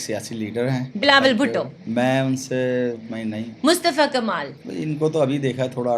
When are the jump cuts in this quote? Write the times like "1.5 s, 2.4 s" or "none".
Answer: 0.9 s, 1.8 s, 3.1 s, 4.6 s